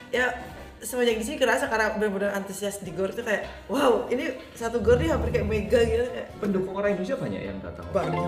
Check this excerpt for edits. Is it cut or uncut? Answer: uncut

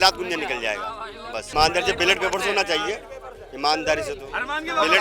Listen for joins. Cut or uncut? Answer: cut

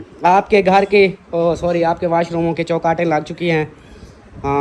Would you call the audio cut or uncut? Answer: uncut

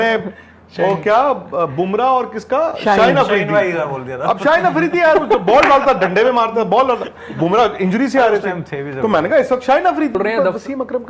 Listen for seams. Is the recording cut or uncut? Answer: cut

